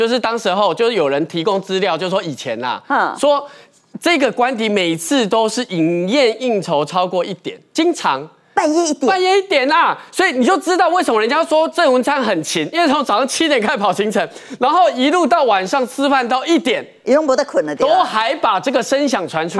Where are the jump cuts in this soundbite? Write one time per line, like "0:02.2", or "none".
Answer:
none